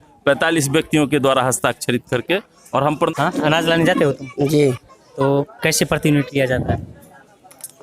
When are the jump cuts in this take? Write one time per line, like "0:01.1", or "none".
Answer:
0:03.1